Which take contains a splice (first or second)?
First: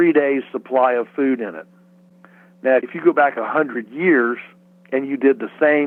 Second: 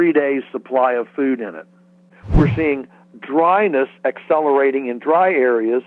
second